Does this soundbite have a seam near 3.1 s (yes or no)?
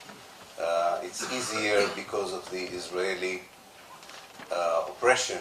no